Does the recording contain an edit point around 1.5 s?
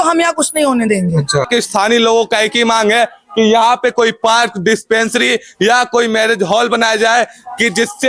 yes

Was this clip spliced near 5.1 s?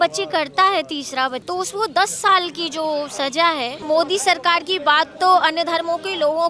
no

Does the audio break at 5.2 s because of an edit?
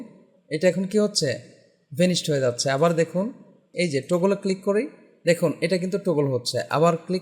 no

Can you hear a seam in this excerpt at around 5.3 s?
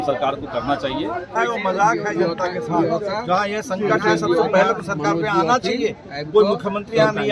no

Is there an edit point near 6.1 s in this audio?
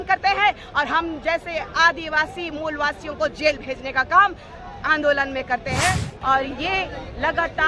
yes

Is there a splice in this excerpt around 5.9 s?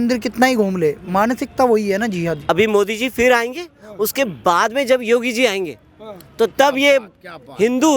no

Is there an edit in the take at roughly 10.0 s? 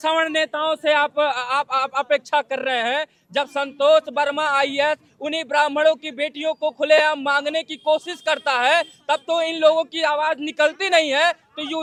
no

